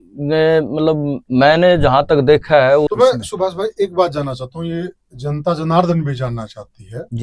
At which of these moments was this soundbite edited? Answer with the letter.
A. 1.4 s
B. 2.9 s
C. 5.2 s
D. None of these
B